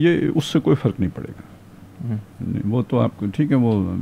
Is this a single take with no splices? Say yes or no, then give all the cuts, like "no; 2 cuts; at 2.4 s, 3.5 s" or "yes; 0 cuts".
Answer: yes; 0 cuts